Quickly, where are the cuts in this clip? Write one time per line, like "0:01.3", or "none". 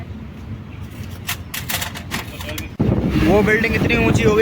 0:02.8